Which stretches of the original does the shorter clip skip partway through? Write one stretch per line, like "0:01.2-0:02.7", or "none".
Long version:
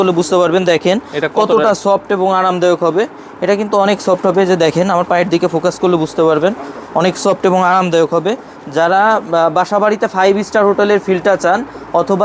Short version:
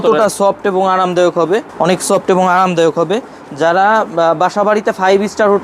0:03.1-0:06.8